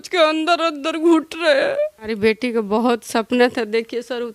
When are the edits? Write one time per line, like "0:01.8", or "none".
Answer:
0:02.1